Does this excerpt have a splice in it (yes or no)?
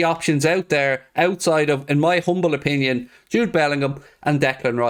no